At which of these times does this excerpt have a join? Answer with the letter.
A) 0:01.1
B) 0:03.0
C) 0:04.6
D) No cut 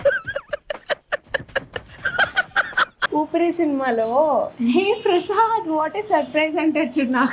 B